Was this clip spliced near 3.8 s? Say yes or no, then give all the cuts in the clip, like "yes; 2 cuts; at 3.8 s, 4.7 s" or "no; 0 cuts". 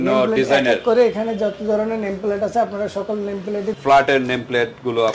yes; 1 cut; at 3.8 s